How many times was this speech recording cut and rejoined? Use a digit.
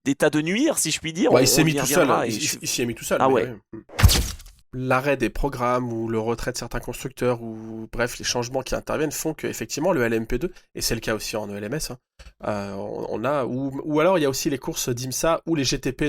1